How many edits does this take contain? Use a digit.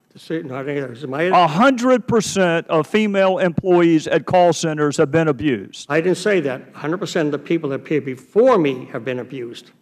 1